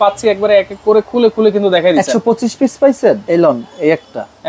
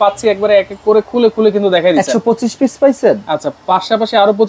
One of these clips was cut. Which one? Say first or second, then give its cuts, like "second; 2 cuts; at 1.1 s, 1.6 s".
first; 1 cut; at 3.2 s